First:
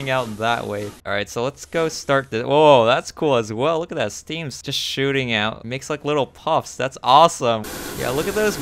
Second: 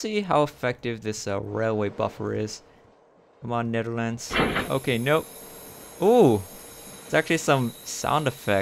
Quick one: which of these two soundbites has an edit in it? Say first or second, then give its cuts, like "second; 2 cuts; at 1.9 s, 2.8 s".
first; 3 cuts; at 0.9 s, 5.6 s, 7.6 s